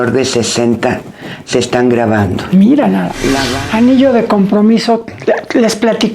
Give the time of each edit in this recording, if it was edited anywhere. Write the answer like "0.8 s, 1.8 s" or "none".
3.5 s